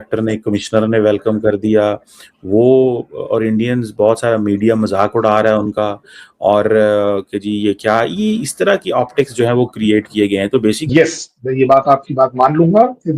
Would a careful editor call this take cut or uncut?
cut